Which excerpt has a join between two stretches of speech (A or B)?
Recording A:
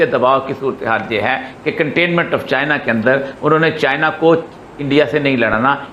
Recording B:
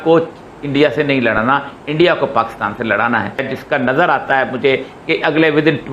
B